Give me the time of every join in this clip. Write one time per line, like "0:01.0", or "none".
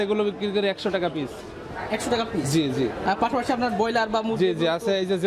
none